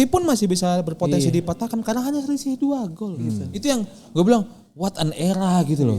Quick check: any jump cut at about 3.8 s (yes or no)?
no